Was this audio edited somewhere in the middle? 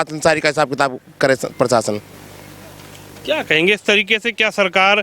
no; 0 cuts

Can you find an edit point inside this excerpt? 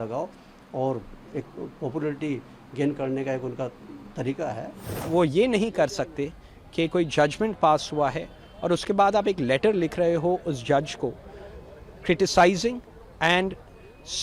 yes; 1 cut; at 4.9 s

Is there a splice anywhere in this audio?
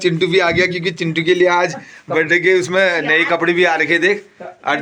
no; 0 cuts

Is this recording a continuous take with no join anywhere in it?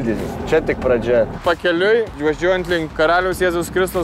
no; 1 cut; at 1.4 s

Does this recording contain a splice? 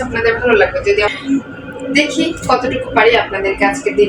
yes; 1 cut; at 1.0 s

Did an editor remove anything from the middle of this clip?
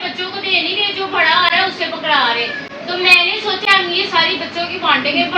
no; 0 cuts

